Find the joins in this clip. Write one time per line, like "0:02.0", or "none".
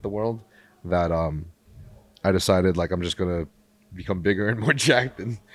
none